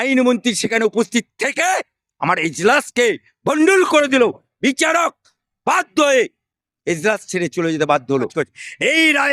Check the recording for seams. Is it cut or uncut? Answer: cut